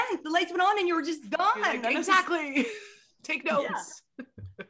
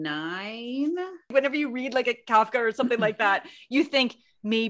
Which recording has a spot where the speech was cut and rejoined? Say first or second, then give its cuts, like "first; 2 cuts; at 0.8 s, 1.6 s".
second; 1 cut; at 1.3 s